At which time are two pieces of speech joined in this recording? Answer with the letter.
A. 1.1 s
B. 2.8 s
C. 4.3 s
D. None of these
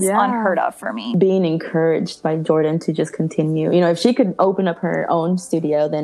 A